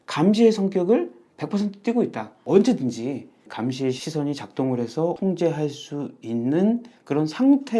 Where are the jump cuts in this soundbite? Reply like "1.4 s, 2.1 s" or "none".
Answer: 2.4 s